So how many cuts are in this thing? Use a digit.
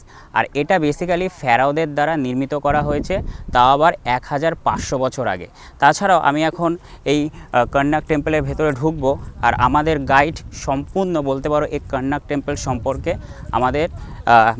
0